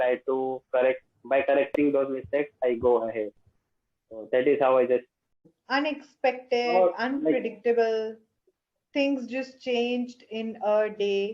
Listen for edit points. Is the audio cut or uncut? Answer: cut